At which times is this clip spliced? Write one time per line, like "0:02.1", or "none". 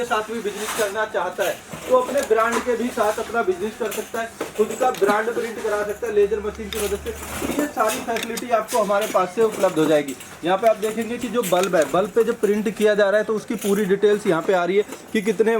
none